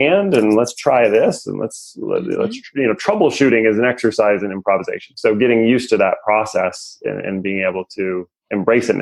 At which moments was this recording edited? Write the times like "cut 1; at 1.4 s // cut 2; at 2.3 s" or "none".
none